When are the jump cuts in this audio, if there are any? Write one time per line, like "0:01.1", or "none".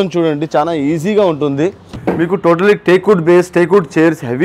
0:01.9